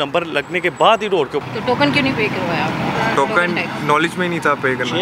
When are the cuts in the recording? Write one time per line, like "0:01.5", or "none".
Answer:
0:01.4